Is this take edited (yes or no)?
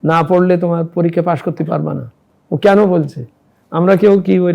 no